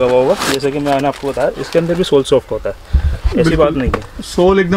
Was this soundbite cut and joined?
no; 0 cuts

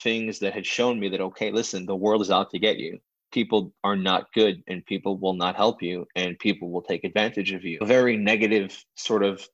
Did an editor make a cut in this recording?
no; 0 cuts

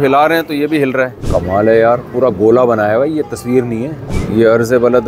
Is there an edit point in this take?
yes; 2 cuts; at 1.2 s, 4.1 s

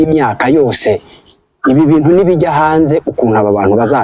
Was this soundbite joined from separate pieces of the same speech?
no; 0 cuts

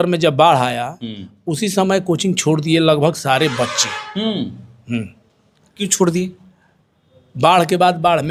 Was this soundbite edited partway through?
no; 0 cuts

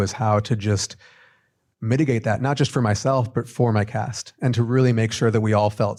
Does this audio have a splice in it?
no; 0 cuts

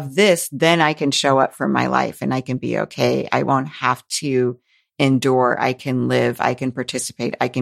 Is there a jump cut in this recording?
no; 0 cuts

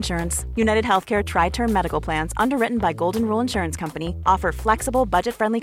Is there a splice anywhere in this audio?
no; 0 cuts

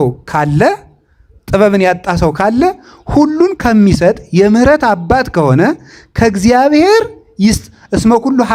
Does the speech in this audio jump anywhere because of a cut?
no; 0 cuts

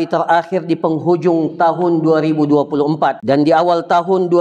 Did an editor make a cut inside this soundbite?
yes; 1 cut; at 3.2 s

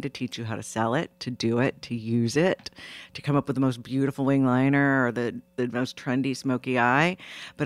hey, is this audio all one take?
yes; 0 cuts

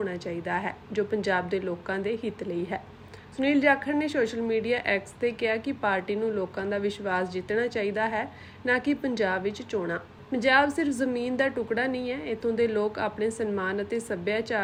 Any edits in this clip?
no; 0 cuts

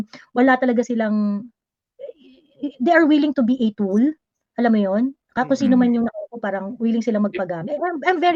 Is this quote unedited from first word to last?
yes; 0 cuts

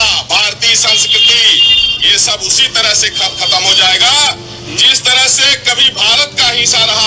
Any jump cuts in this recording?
no; 0 cuts

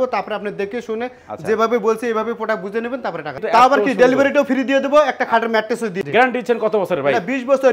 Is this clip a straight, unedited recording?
no; 2 cuts; at 3.3 s, 5.9 s

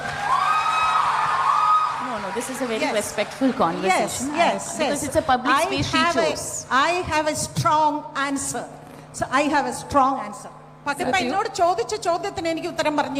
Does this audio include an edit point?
yes; 1 cut; at 11.0 s

